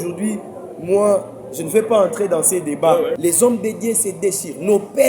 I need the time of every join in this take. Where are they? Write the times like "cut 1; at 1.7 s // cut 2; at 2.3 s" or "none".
cut 1; at 3.2 s